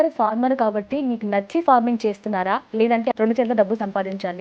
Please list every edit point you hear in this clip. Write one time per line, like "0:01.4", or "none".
0:03.1